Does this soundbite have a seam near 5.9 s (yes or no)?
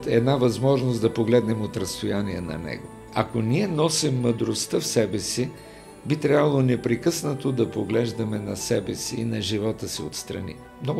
no